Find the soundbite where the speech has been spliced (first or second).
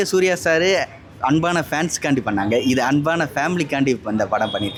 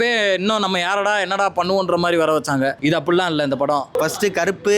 second